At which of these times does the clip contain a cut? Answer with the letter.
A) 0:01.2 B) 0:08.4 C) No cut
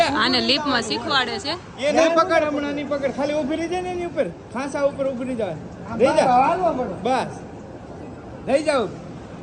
C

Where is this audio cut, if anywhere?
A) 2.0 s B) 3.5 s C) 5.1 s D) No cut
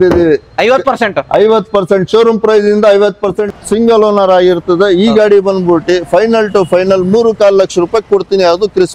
B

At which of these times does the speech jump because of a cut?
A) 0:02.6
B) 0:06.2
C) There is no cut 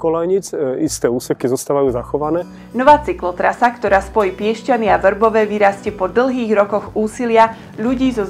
A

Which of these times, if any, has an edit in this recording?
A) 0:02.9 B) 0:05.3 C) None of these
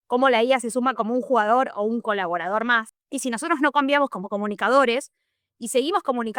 A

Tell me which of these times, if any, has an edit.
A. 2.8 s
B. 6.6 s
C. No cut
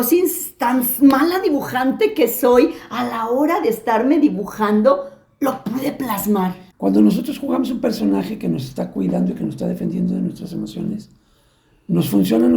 B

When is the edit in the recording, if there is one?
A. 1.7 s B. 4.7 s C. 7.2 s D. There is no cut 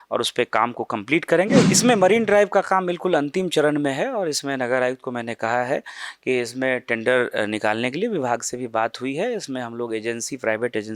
A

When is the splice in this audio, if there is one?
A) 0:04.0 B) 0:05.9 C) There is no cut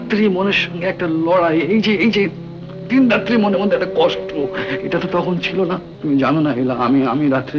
B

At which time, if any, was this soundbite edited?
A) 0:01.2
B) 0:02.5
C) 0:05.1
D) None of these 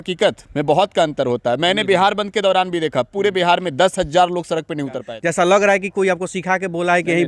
C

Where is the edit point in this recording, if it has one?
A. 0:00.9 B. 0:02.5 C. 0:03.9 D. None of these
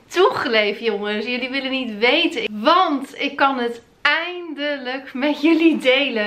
B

